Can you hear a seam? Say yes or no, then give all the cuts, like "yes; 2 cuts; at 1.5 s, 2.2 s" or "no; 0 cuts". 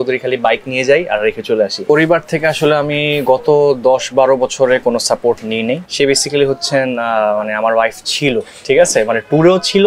yes; 2 cuts; at 1.8 s, 5.8 s